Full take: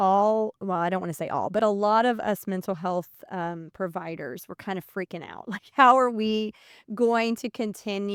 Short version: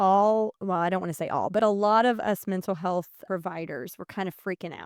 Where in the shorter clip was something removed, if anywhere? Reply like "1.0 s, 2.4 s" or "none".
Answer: 3.2 s